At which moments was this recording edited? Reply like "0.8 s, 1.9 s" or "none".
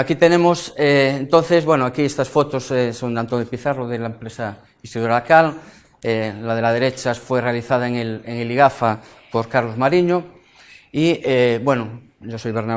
8.4 s